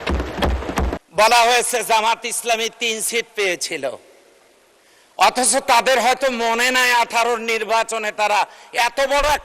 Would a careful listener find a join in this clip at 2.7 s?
no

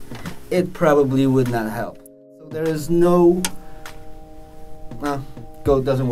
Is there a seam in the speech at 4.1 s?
no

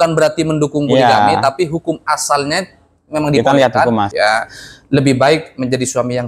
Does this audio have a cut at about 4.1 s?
yes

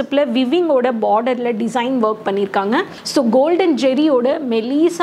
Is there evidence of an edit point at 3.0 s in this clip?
yes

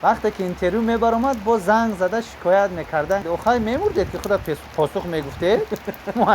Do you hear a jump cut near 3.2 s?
yes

